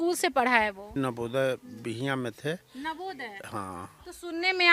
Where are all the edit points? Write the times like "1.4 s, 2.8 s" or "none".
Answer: 1.0 s